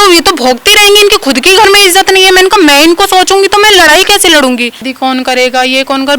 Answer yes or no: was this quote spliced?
yes